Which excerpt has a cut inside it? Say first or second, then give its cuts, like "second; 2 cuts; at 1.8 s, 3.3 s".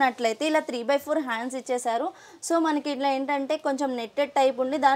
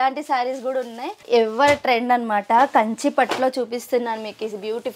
second; 1 cut; at 1.1 s